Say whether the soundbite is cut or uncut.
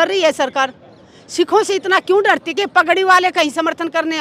uncut